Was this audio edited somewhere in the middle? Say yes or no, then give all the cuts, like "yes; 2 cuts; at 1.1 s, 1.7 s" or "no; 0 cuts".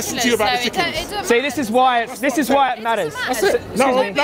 no; 0 cuts